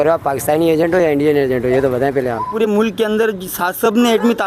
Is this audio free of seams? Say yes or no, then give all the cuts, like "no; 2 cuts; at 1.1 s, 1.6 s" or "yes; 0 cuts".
no; 1 cut; at 2.5 s